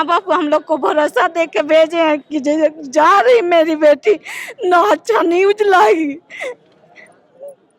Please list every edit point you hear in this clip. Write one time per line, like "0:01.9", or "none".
none